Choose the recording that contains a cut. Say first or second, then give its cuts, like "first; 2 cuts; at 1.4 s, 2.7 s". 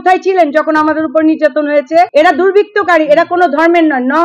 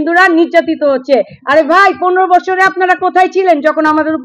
first; 1 cut; at 2.1 s